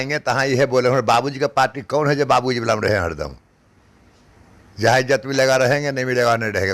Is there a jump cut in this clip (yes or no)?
no